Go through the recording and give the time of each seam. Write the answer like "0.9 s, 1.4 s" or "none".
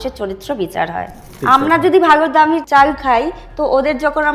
1.3 s, 2.6 s